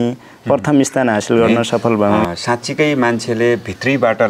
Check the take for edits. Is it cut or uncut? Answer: cut